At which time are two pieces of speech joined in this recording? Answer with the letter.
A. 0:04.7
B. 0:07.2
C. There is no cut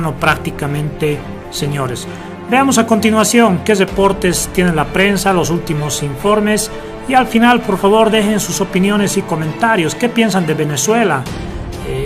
A